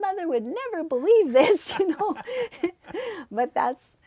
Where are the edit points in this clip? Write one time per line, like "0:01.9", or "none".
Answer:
none